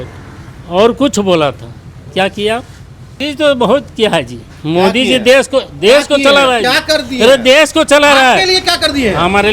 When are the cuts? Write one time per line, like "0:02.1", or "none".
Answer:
0:03.2